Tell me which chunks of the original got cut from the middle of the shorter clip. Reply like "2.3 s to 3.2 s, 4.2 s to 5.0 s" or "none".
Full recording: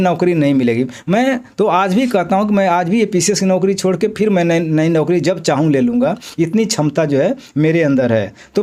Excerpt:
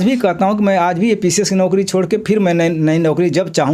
none